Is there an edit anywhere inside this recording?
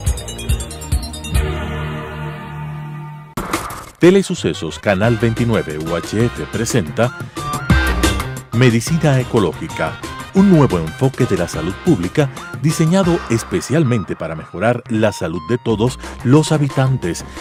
no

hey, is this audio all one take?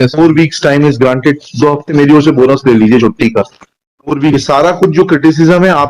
no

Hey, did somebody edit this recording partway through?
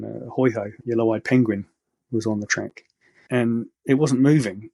no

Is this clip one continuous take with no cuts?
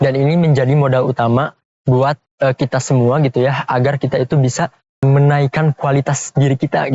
no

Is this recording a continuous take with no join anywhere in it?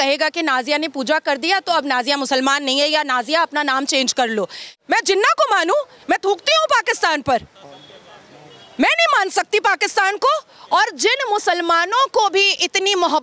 no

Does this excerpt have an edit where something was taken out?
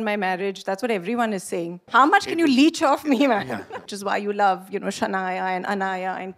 yes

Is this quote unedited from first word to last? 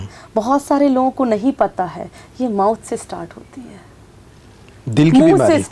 yes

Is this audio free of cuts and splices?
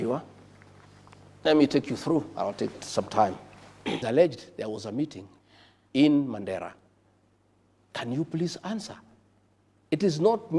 no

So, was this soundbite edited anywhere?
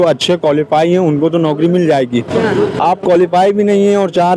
no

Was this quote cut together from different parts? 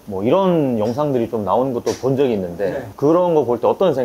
yes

